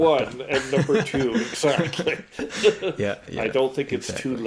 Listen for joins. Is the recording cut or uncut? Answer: cut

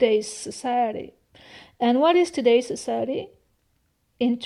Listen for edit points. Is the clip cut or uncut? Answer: uncut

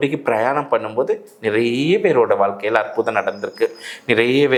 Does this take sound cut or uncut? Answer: uncut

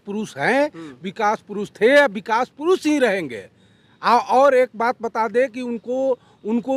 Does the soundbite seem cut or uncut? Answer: uncut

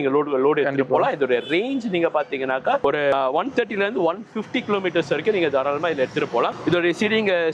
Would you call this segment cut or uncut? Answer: uncut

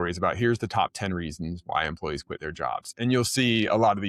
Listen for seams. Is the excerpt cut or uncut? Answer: uncut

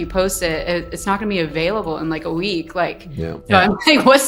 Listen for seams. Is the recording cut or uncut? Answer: uncut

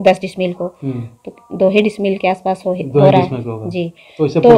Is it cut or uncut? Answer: uncut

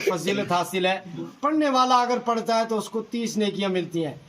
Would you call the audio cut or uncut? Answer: cut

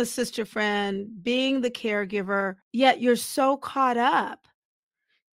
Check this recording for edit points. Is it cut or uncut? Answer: cut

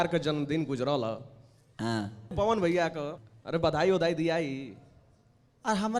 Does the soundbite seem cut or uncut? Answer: cut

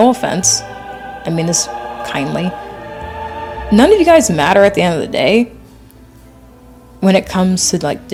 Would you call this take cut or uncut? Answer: uncut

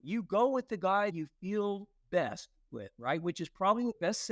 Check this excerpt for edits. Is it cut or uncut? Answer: cut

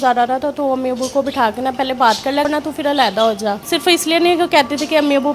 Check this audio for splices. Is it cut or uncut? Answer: cut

